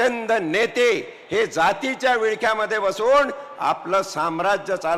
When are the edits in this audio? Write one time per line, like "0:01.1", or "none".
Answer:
none